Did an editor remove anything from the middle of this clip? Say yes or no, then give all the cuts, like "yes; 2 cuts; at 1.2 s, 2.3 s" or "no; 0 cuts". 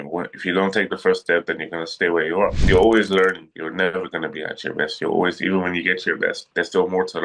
yes; 1 cut; at 2.6 s